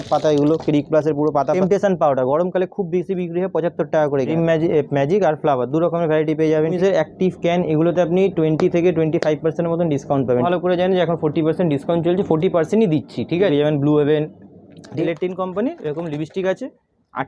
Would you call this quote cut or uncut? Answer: cut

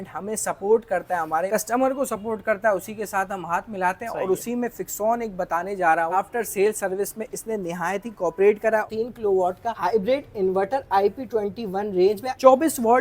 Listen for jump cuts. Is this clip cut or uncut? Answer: cut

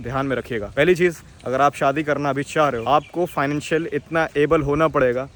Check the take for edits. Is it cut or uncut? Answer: uncut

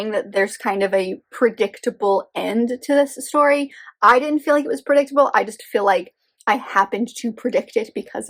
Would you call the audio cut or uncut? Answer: uncut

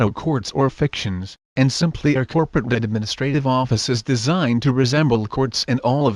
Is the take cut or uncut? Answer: uncut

